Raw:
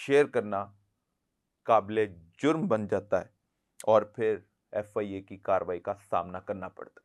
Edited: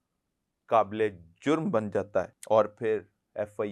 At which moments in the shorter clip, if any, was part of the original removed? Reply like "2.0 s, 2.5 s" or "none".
2.3 s